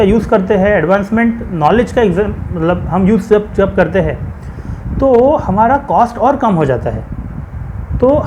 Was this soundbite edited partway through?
no; 0 cuts

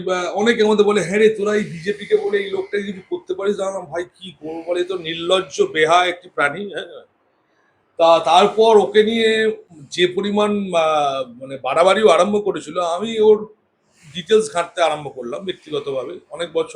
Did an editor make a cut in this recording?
no; 0 cuts

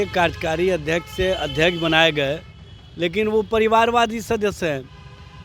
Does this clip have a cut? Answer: no; 0 cuts

